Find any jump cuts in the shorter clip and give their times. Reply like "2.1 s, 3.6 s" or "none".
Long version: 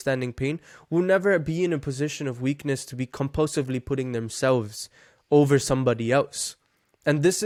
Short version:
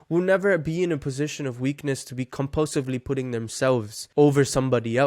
4.0 s